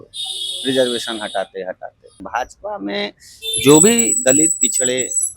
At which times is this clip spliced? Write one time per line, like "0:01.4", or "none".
0:02.2